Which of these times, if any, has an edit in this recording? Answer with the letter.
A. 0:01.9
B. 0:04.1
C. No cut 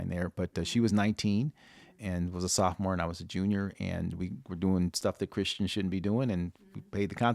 A